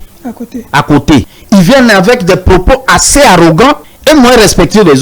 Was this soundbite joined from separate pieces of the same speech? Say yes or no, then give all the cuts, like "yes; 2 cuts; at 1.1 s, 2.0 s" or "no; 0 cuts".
yes; 2 cuts; at 1.4 s, 3.9 s